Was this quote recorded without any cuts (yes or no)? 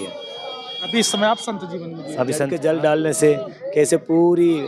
no